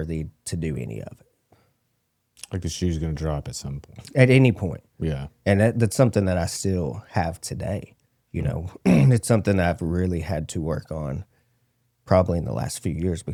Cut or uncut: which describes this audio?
uncut